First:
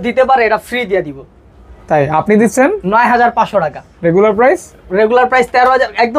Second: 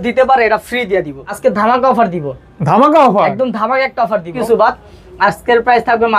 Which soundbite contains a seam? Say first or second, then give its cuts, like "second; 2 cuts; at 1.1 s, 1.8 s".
second; 2 cuts; at 1.2 s, 4.3 s